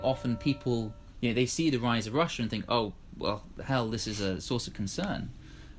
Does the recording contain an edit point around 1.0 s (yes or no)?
yes